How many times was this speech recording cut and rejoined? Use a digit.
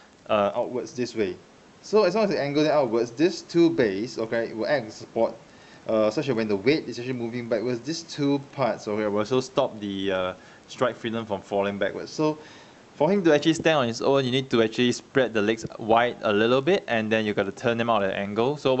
0